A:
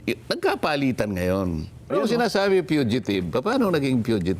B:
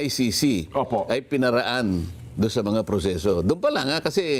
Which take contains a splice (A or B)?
A